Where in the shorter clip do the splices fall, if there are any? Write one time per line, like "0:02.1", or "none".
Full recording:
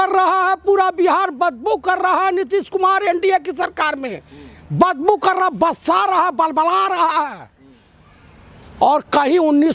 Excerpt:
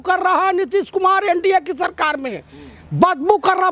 none